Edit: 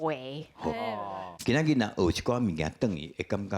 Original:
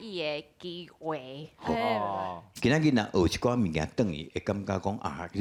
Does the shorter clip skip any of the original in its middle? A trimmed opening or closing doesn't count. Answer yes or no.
yes